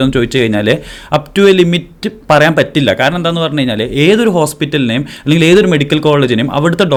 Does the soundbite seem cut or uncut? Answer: uncut